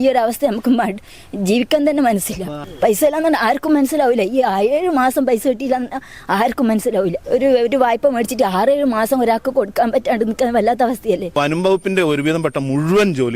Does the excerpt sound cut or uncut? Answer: cut